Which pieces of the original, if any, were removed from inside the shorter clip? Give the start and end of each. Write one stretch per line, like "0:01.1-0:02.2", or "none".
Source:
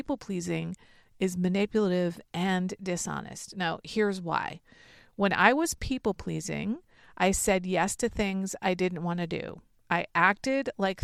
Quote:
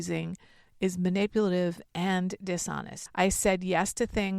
0:03.3-0:07.0